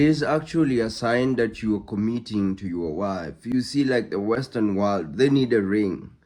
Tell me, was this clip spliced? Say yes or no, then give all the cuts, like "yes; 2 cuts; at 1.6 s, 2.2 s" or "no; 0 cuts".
no; 0 cuts